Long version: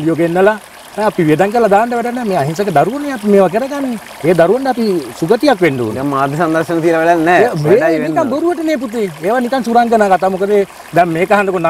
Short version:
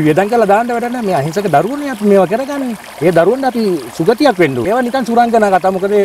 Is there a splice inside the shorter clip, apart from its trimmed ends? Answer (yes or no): yes